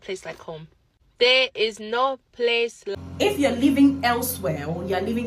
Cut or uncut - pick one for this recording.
cut